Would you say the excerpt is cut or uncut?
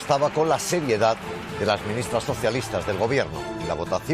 cut